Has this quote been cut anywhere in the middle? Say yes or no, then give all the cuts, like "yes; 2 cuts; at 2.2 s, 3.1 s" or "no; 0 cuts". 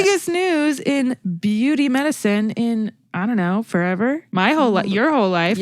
no; 0 cuts